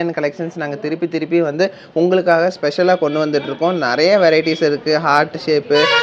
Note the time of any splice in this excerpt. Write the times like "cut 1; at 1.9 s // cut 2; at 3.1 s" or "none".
none